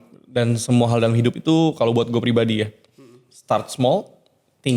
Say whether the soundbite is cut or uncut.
uncut